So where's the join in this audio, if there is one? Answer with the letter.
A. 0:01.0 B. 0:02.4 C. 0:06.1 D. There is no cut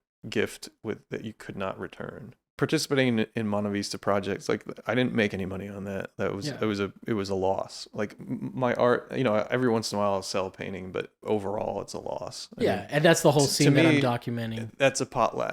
B